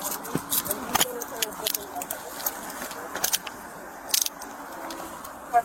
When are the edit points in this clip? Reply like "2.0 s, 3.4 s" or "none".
none